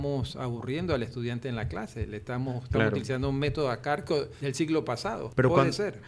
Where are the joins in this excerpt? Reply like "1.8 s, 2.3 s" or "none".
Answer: 4.3 s, 5.2 s